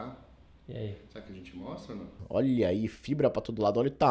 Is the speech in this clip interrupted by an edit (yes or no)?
yes